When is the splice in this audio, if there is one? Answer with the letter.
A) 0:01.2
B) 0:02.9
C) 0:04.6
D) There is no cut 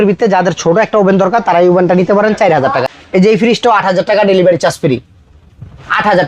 B